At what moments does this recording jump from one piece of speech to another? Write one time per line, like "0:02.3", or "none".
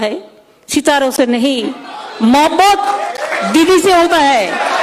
none